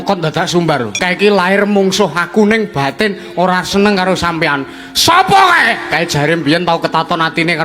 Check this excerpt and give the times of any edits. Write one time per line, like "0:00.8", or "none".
0:00.9